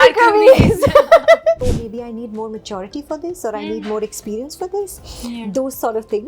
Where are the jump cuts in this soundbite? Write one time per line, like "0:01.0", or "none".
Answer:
0:01.6